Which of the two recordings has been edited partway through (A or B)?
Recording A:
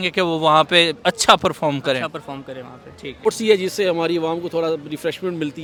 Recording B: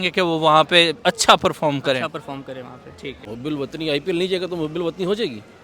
B